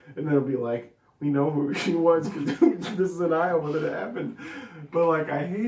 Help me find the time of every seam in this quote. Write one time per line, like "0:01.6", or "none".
none